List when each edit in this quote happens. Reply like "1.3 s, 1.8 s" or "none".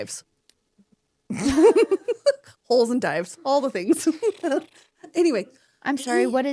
none